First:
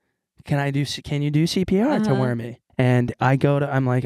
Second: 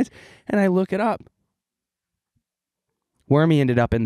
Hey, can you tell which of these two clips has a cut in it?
first; 1 cut; at 2.6 s

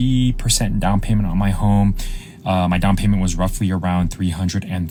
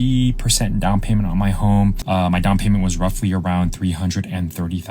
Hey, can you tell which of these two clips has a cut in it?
second; 1 cut; at 2.0 s

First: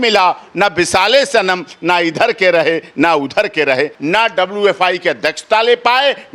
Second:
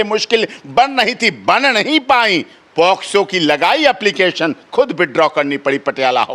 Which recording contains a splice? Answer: first; 1 cut; at 4.0 s

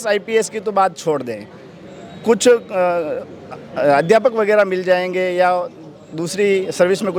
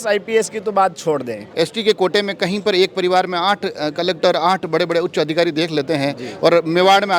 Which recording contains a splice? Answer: second; 1 cut; at 1.4 s

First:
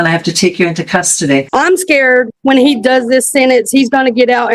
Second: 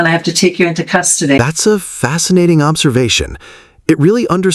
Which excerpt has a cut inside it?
first; 1 cut; at 1.4 s

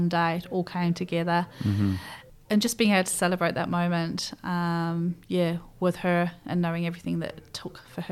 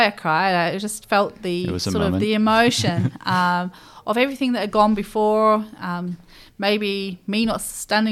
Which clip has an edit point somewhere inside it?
first; 1 cut; at 2.1 s

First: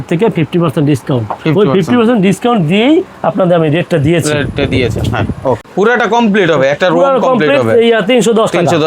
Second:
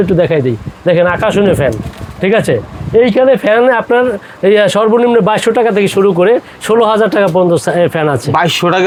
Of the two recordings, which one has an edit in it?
first; 1 cut; at 5.6 s

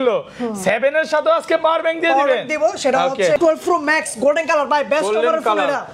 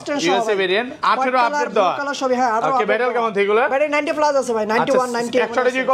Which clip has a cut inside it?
first; 1 cut; at 3.4 s

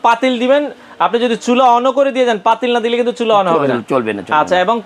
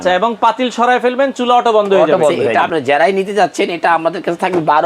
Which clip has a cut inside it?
second; 1 cut; at 2.5 s

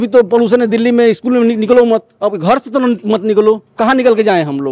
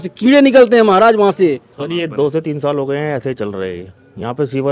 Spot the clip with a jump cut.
second; 1 cut; at 1.7 s

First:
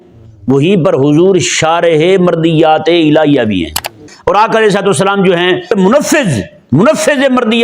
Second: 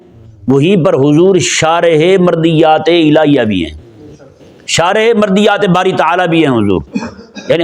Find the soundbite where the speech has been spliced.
first; 2 cuts; at 4.1 s, 5.7 s

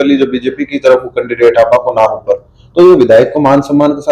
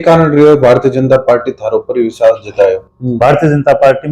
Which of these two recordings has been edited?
second; 1 cut; at 2.9 s

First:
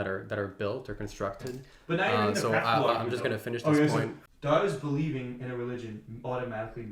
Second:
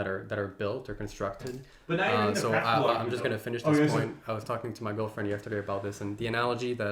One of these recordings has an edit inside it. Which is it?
first; 1 cut; at 4.2 s

